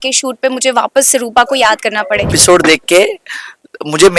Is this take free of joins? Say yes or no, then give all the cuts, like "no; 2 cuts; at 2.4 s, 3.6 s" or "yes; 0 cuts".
no; 1 cut; at 2.4 s